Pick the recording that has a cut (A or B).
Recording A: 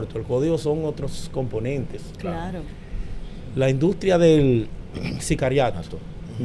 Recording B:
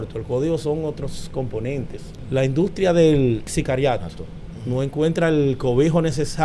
B